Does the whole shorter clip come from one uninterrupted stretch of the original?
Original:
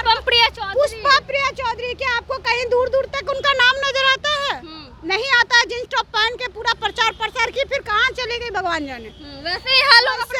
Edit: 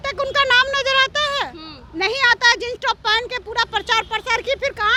yes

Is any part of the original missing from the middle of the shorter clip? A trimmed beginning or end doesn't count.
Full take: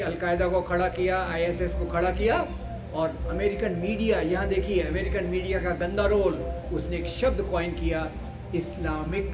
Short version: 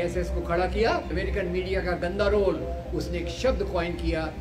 yes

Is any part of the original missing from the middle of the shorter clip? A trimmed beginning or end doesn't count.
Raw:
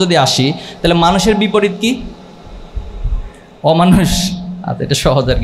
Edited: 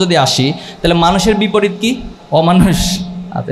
yes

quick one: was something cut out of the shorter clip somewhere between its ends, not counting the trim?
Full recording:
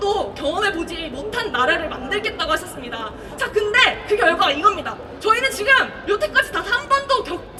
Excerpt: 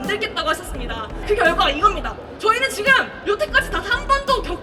yes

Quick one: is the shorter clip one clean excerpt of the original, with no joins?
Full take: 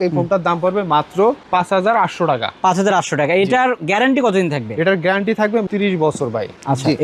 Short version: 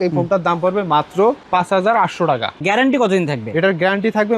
no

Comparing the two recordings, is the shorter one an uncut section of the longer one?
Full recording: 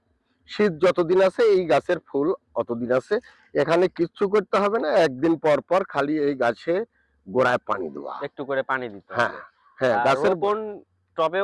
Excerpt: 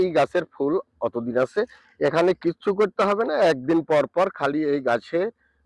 yes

